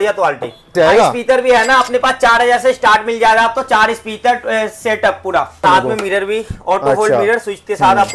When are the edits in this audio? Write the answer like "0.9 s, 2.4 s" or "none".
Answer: 0.7 s, 5.6 s